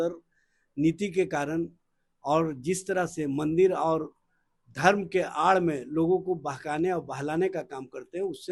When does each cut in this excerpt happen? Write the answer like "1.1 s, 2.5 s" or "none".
none